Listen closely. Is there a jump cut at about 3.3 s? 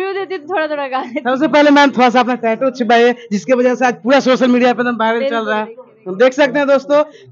no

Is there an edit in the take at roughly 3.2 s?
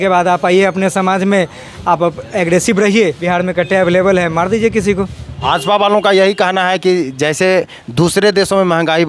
yes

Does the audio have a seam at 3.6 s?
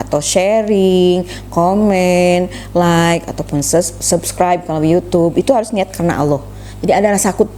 no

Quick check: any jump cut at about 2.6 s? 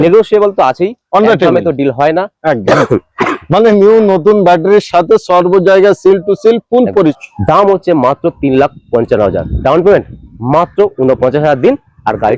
yes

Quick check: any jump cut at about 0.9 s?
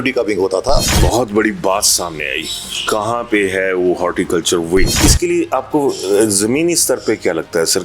yes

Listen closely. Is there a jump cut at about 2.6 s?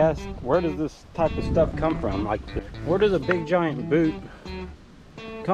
yes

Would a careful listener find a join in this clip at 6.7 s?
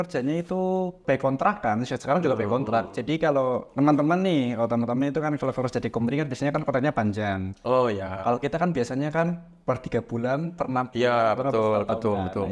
no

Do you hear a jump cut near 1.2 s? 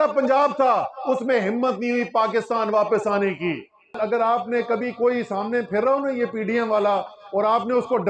no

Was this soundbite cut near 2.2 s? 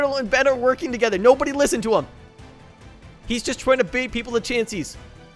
no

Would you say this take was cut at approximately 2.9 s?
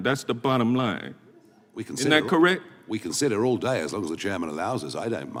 no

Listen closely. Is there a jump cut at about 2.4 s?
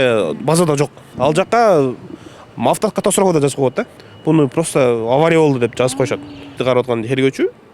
no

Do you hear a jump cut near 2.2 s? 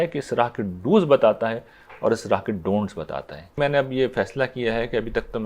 no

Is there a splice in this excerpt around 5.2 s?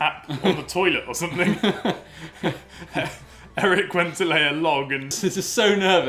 yes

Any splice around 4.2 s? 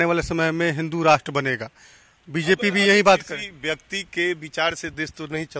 no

